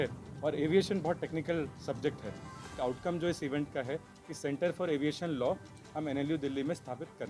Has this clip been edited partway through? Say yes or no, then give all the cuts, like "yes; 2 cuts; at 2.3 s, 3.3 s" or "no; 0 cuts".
yes; 1 cut; at 2.7 s